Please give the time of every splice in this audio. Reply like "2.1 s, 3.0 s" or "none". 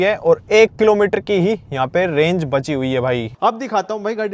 3.3 s